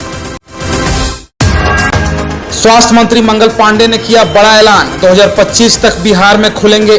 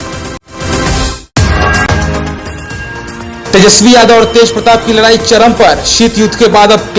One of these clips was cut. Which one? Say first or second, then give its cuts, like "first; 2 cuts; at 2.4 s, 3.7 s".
first; 1 cut; at 1.2 s